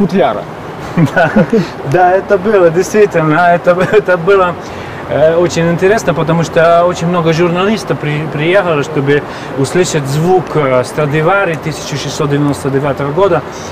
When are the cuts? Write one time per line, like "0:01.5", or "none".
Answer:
none